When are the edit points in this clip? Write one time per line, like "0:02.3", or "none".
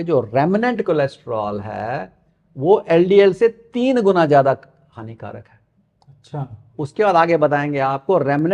none

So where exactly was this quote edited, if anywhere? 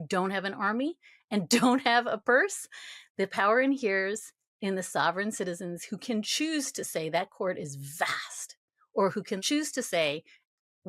0:09.4

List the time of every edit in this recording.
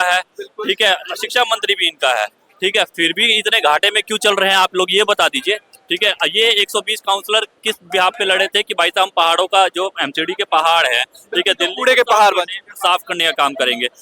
none

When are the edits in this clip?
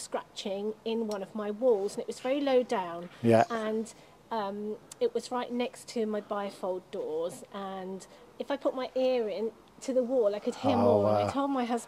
none

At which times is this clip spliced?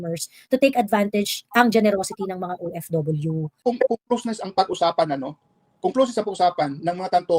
0:03.6

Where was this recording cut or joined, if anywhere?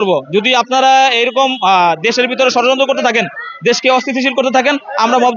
none

